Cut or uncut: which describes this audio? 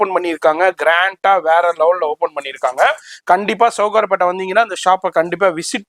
uncut